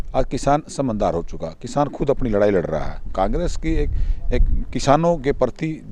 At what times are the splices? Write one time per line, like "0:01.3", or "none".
0:03.1